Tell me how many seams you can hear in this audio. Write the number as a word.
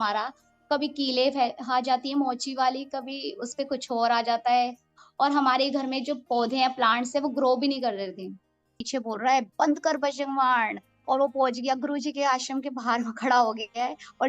one